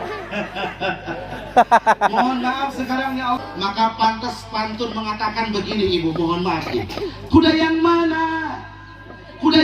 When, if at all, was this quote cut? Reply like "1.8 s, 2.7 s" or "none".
3.4 s